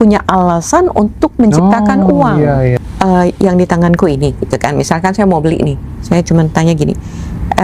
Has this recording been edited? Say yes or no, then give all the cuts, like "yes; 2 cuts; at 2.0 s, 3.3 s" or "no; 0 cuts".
yes; 1 cut; at 2.8 s